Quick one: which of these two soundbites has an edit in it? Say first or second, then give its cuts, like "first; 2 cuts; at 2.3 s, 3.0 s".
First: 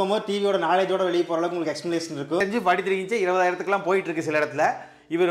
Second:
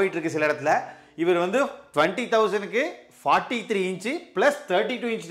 first; 1 cut; at 2.4 s